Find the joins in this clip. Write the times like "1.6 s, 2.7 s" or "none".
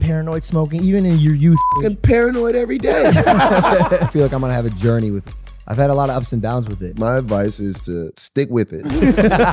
4.1 s, 5.2 s, 6.8 s, 8.7 s